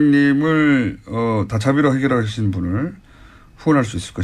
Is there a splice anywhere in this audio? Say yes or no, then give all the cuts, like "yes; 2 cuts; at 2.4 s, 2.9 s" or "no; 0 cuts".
yes; 1 cut; at 1.9 s